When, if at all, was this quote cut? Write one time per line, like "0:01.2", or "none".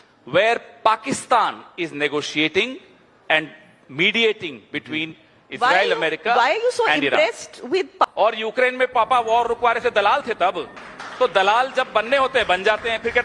0:08.0